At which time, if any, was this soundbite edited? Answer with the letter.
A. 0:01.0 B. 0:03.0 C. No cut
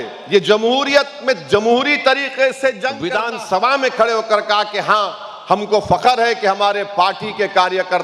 B